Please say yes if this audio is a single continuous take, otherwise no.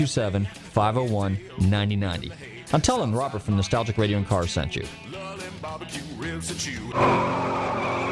no